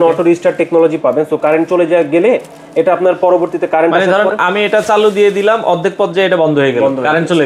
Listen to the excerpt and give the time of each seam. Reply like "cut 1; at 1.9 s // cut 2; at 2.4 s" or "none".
none